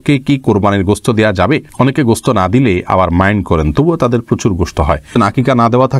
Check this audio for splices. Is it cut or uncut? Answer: cut